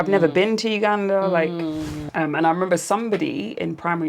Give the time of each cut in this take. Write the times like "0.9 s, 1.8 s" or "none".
2.0 s